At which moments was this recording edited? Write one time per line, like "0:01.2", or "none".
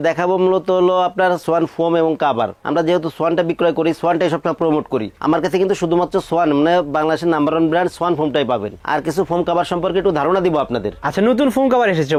none